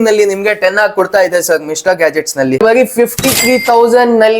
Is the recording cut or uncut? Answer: cut